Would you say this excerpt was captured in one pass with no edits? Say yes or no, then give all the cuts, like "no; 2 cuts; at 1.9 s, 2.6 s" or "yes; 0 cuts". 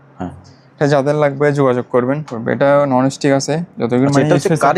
no; 1 cut; at 2.3 s